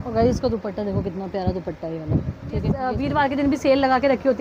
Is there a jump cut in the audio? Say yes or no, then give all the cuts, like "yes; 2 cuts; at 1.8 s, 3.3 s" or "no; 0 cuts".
yes; 1 cut; at 2.9 s